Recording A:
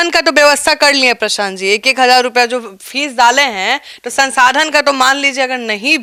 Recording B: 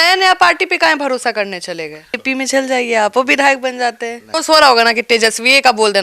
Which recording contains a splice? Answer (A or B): B